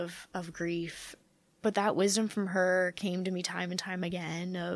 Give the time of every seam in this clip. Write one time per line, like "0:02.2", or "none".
0:01.0